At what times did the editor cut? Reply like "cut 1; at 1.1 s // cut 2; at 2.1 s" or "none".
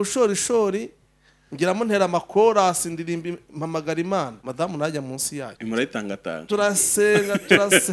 cut 1; at 4.4 s // cut 2; at 5.5 s